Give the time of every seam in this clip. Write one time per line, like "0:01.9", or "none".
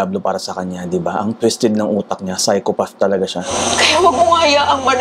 0:03.5

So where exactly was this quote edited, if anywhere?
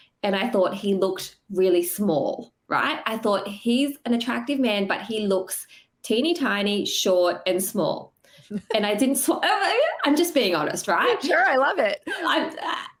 none

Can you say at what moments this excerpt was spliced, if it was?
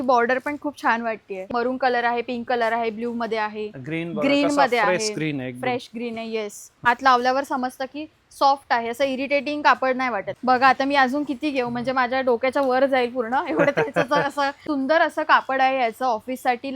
0:01.5
0:06.9
0:10.3
0:14.6

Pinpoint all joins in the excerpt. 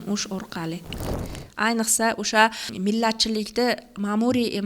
0:01.1
0:02.7

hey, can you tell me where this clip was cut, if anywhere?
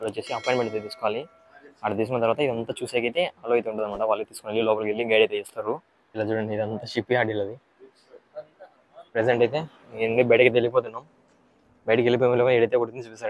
none

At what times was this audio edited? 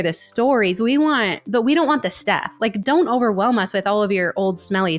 none

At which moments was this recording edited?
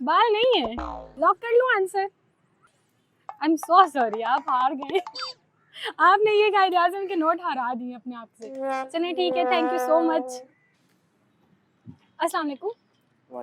none

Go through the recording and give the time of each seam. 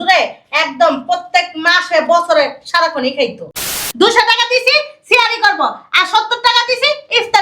0:03.6

